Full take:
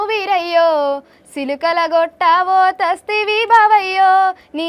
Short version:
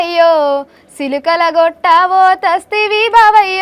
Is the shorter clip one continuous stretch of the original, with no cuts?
yes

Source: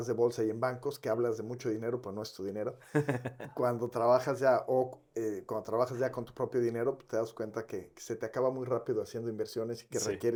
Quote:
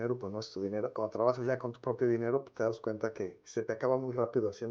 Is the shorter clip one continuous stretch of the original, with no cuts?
no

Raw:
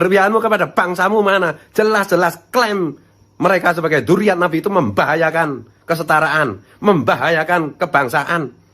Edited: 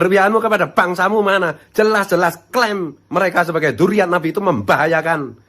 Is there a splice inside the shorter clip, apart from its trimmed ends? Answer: yes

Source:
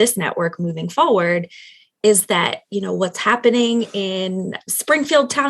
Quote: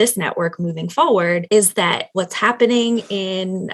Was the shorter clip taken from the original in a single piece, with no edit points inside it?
no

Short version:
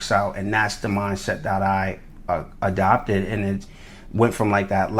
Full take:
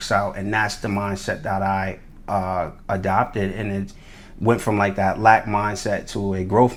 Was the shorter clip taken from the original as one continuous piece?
no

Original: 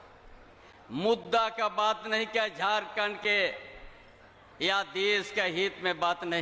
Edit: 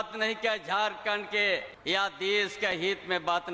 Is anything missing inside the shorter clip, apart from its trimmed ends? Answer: yes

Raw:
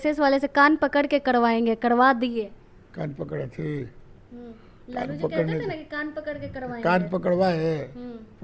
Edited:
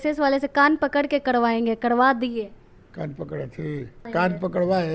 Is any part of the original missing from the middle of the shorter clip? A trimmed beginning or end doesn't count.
yes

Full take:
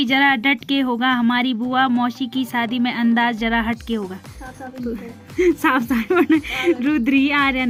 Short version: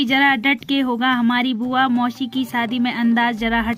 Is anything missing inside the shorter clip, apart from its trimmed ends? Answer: no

